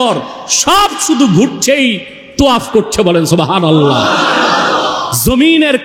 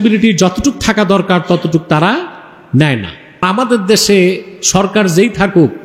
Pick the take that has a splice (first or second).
second